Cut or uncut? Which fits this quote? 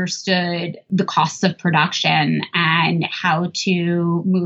uncut